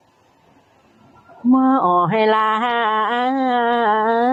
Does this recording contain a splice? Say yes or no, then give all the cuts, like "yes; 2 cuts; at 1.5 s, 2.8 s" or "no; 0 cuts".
no; 0 cuts